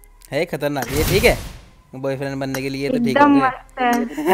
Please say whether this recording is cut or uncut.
uncut